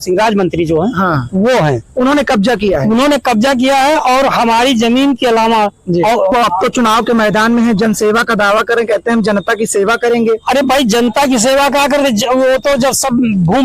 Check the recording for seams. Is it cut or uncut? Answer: cut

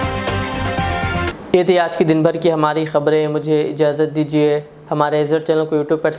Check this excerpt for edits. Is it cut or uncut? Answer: uncut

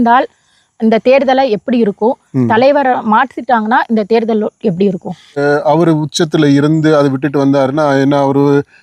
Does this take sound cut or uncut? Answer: cut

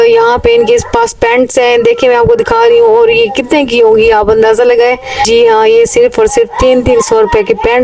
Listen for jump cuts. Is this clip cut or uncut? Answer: cut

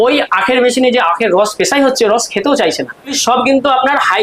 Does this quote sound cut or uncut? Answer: cut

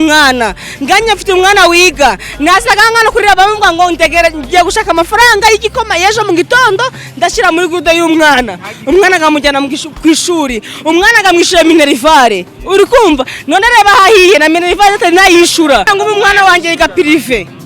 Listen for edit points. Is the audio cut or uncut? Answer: cut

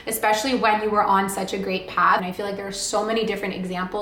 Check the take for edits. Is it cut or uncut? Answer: cut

